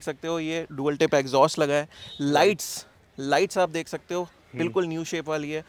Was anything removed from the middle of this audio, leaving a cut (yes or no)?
no